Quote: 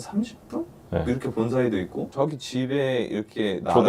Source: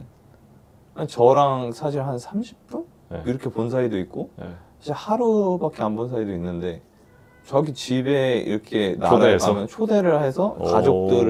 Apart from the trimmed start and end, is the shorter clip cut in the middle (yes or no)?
yes